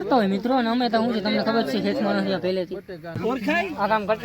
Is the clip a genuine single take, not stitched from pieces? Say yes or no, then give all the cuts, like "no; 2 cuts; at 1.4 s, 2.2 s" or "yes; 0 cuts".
no; 1 cut; at 3.2 s